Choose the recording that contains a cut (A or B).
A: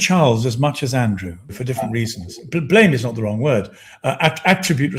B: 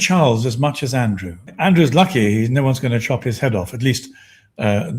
B